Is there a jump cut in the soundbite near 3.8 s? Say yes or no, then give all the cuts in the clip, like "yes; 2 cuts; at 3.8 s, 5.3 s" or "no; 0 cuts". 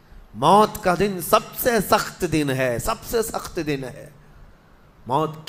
no; 0 cuts